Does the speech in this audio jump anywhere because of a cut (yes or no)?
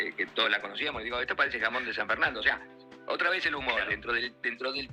no